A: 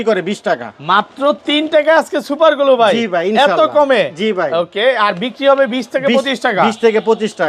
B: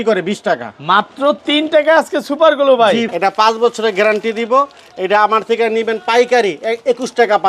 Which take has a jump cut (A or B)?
B